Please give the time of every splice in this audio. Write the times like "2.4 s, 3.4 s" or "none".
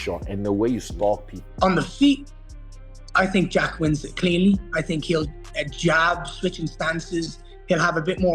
1.4 s